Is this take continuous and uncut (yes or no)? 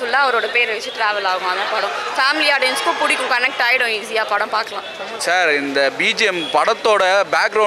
no